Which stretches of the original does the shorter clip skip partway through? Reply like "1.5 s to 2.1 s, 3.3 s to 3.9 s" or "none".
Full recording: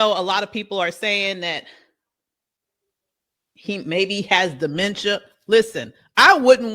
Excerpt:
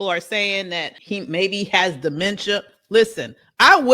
1.7 s to 3.5 s